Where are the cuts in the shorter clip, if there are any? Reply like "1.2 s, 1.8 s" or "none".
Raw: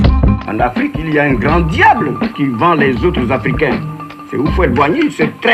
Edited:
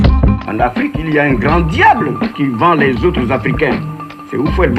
none